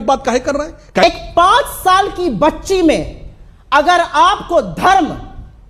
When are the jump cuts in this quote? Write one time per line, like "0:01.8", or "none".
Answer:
0:01.0